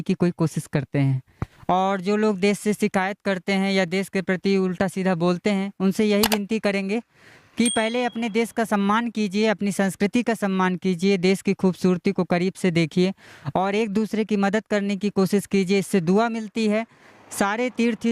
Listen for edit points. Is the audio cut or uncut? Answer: cut